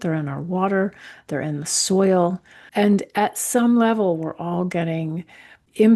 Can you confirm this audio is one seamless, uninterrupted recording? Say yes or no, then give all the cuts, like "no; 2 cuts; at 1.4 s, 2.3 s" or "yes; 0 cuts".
yes; 0 cuts